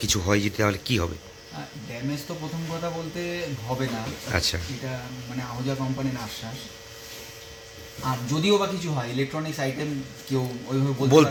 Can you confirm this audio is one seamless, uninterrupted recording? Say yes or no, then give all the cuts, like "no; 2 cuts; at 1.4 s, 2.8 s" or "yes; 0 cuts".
yes; 0 cuts